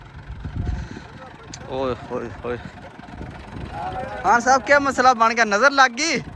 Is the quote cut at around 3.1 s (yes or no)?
yes